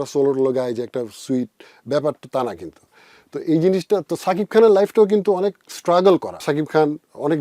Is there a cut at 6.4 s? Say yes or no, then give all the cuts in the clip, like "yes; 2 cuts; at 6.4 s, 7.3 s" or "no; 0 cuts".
yes; 1 cut; at 6.4 s